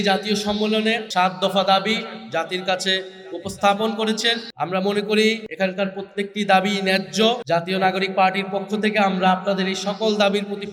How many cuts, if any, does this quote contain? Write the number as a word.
four